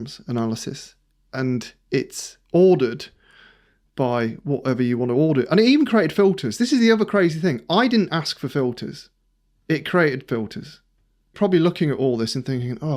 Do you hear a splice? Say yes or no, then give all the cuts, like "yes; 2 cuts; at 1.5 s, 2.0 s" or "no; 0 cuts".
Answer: yes; 1 cut; at 11.3 s